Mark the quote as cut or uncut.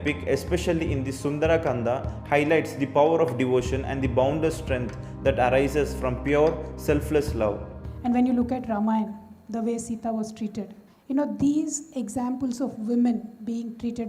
cut